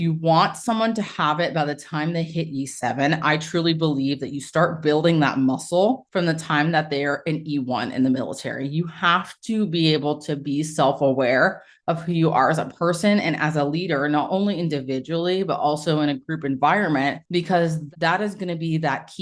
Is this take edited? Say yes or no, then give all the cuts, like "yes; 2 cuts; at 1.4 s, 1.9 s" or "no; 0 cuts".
yes; 2 cuts; at 6.0 s, 17.6 s